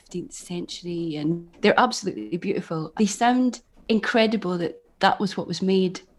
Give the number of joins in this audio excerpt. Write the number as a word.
three